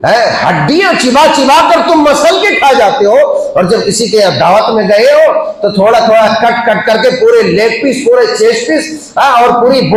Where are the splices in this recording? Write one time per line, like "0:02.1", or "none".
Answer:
none